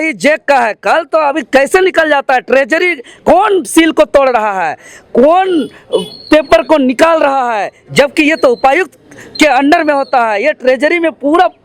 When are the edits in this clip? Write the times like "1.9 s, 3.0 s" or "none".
none